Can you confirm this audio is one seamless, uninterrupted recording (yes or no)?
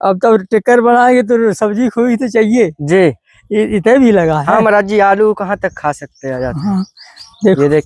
yes